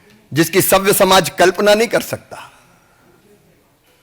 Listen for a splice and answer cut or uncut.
uncut